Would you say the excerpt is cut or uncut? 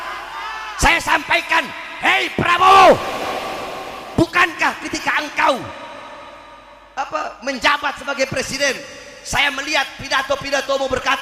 uncut